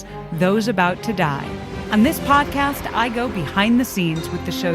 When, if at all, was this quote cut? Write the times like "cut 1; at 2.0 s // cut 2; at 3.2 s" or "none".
cut 1; at 1.8 s